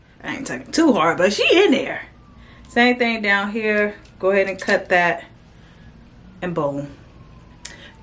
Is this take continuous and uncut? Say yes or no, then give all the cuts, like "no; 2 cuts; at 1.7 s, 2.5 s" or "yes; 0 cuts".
yes; 0 cuts